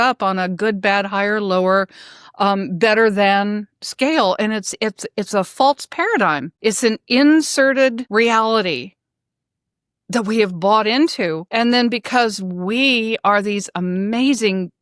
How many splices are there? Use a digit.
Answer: 3